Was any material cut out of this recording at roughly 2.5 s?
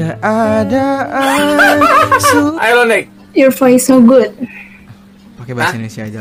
yes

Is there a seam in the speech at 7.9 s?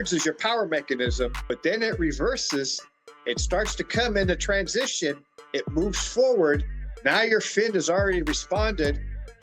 no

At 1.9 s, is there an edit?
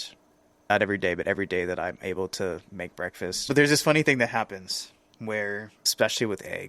no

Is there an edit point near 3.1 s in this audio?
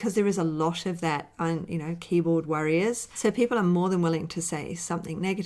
yes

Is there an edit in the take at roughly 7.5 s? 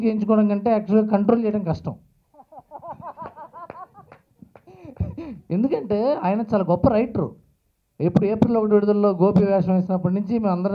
no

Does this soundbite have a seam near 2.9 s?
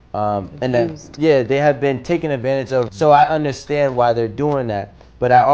yes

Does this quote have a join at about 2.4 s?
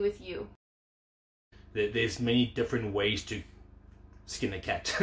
no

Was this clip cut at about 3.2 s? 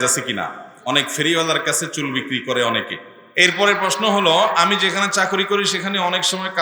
yes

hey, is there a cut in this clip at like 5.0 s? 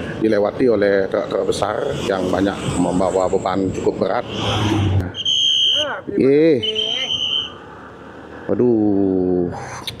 yes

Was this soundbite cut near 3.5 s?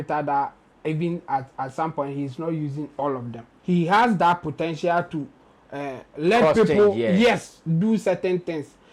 yes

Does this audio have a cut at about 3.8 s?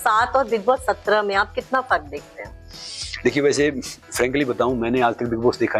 no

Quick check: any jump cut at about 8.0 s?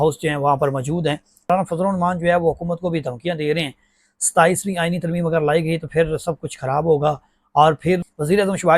yes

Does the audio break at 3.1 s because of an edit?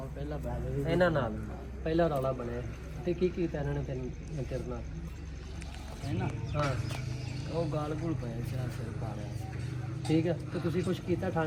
no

